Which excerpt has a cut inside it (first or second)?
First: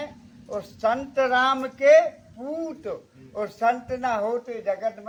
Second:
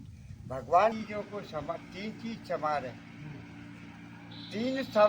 second